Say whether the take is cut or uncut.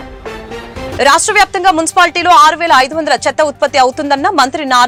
uncut